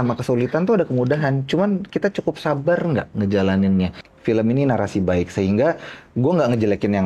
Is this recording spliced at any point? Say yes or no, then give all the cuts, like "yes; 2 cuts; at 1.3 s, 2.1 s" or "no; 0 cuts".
yes; 1 cut; at 4.0 s